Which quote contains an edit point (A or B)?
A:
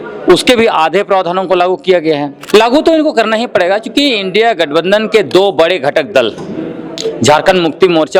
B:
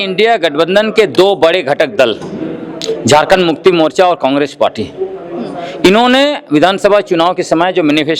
A